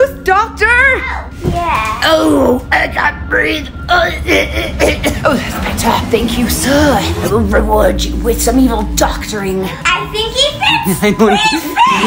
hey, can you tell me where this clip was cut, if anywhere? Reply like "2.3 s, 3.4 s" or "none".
none

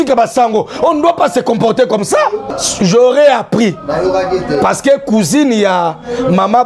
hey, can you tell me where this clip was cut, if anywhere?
2.5 s

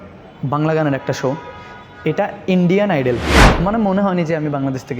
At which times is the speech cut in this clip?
3.4 s

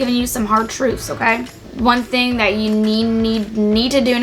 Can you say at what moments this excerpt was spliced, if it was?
1.7 s

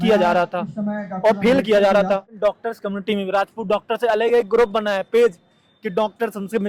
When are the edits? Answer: 2.3 s

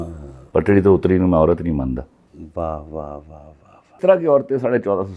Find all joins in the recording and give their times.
4.0 s

